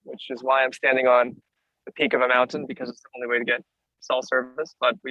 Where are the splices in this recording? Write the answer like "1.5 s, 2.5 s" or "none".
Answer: none